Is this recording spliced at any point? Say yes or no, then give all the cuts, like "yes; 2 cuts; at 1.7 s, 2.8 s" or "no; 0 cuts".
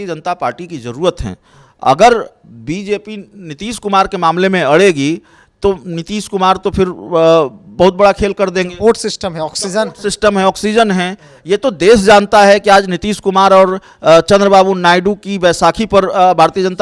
no; 0 cuts